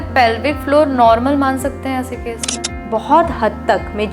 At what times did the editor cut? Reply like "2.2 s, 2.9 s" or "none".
2.7 s